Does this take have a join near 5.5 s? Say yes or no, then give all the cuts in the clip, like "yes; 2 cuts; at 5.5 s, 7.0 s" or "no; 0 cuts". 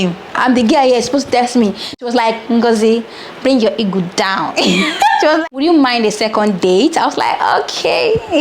yes; 2 cuts; at 2.0 s, 5.5 s